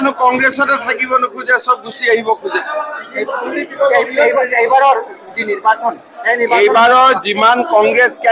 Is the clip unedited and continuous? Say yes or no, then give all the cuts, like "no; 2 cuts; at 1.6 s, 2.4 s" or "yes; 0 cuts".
yes; 0 cuts